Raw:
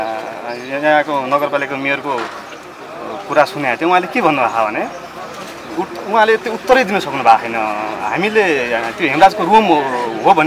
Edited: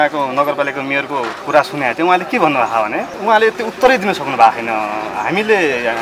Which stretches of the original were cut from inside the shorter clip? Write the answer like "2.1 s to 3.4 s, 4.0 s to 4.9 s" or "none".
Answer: 2.3 s to 3.2 s, 4.9 s to 6.0 s

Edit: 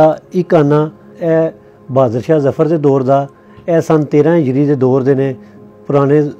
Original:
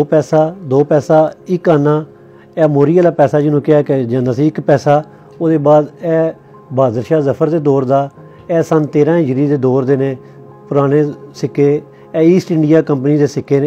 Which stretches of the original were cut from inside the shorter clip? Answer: 2.3 s to 6.0 s

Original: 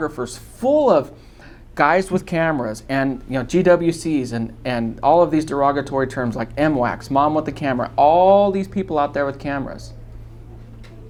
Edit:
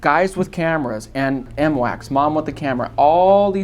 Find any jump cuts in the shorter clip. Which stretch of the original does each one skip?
3.2 s to 6.5 s

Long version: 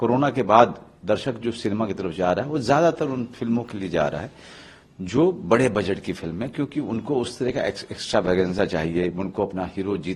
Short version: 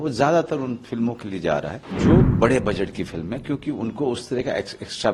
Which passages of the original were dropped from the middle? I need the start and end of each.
4.3 s to 4.9 s

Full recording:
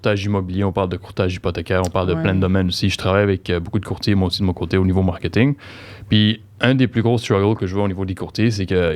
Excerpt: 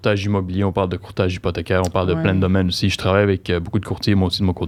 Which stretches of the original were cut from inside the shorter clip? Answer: none

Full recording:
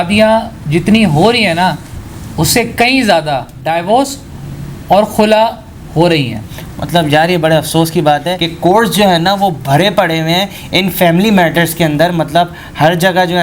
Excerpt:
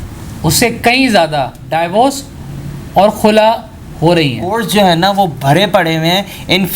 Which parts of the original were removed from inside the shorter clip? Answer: 6.9 s to 9.2 s

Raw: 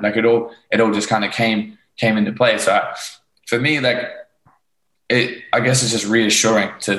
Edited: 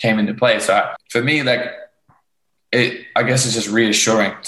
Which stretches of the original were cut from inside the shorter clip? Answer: 3.0 s to 3.4 s

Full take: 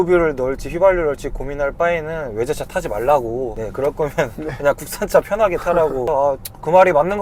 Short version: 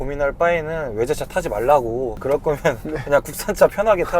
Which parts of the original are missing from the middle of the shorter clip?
3.5 s to 3.7 s

